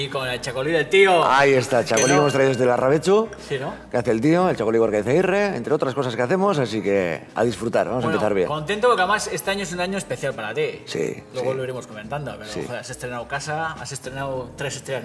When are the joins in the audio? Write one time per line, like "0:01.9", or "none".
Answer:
none